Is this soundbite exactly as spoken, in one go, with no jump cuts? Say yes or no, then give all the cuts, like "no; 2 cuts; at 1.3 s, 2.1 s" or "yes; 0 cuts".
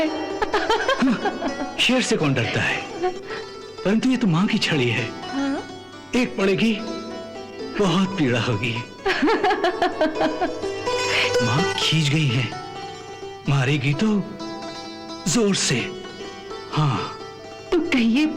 yes; 0 cuts